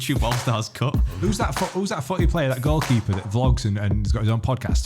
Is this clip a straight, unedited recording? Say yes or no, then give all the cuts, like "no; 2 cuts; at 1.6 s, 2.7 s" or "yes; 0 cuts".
no; 1 cut; at 1.2 s